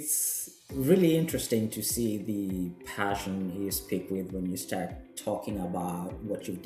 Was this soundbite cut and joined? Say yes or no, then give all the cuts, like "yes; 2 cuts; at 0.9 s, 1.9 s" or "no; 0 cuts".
no; 0 cuts